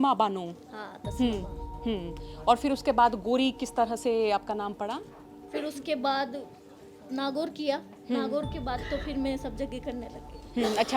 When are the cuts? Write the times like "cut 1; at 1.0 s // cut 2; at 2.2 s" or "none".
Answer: cut 1; at 5.4 s